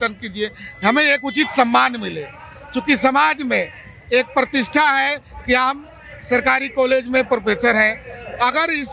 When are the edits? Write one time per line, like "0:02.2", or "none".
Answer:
none